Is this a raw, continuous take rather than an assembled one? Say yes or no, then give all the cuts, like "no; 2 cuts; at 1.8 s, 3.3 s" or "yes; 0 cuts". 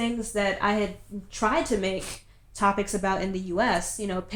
yes; 0 cuts